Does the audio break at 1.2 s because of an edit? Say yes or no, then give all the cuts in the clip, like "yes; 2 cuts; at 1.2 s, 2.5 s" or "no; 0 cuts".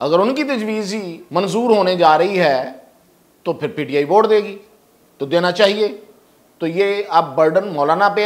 yes; 1 cut; at 1.2 s